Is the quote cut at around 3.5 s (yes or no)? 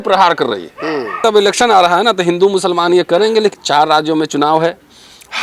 yes